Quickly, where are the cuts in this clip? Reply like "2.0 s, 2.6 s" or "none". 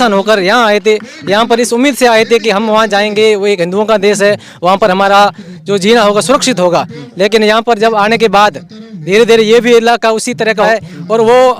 10.7 s